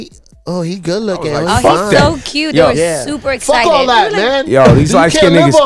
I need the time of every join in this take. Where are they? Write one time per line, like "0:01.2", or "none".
0:04.0